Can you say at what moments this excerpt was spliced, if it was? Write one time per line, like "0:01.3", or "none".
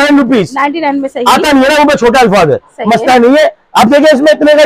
none